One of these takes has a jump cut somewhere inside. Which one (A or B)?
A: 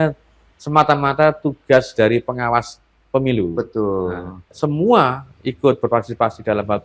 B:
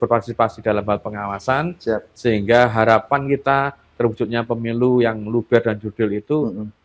A